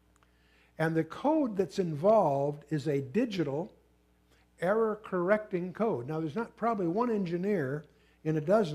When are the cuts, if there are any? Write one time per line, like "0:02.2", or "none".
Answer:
0:07.4